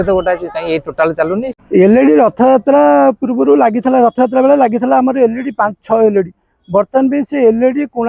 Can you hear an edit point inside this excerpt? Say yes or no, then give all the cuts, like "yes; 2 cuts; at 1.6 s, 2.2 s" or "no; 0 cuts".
yes; 1 cut; at 1.5 s